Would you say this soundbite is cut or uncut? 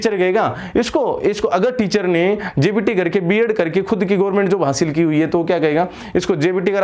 uncut